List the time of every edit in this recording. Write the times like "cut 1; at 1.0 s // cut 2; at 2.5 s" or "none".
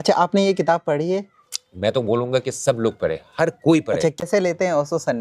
cut 1; at 4.2 s